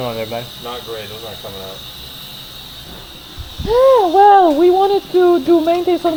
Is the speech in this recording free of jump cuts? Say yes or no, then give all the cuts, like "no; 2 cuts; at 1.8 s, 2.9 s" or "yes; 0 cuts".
yes; 0 cuts